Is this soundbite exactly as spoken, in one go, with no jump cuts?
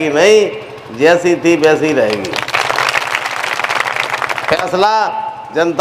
no; 1 cut; at 4.6 s

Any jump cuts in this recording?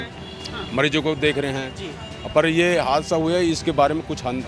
no; 0 cuts

